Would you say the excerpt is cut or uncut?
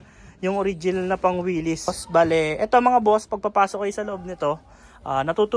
cut